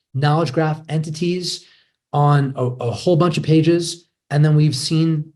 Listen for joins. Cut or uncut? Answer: uncut